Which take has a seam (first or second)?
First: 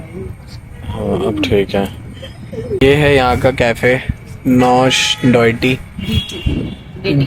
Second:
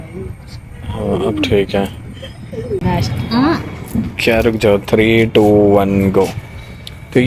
first